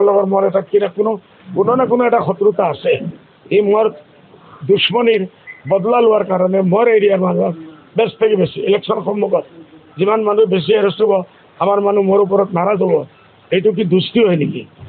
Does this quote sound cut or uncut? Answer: uncut